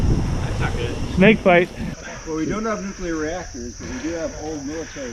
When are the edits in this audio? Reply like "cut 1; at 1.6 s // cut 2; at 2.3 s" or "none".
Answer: cut 1; at 2.0 s